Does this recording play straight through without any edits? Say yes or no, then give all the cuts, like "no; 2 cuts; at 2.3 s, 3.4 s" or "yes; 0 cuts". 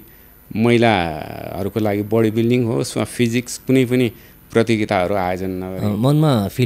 no; 1 cut; at 5.7 s